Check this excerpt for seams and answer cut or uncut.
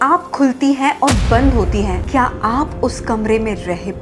cut